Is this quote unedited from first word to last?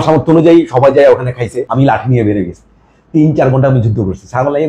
no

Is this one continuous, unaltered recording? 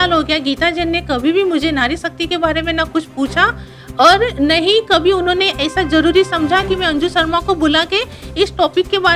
yes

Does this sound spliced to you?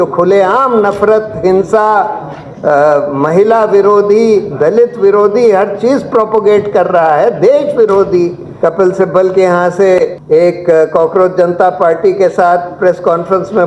yes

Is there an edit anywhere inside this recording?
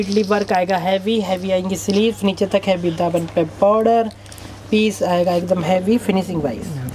no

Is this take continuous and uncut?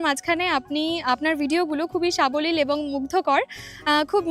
yes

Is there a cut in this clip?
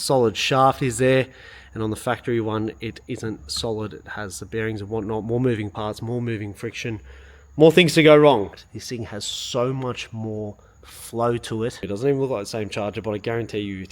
yes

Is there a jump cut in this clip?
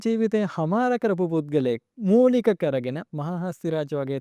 no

